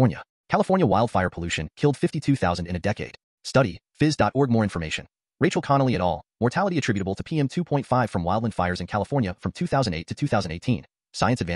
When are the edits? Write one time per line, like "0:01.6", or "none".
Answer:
none